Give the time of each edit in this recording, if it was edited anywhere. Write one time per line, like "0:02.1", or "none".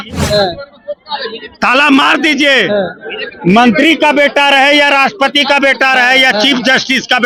none